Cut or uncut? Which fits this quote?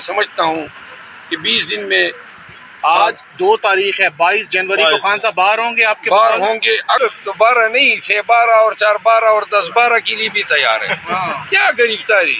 cut